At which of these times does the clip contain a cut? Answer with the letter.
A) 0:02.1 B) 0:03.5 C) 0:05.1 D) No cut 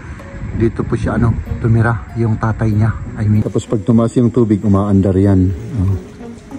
B